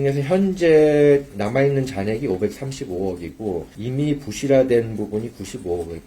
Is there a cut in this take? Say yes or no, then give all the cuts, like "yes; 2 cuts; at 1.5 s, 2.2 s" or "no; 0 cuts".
yes; 1 cut; at 3.7 s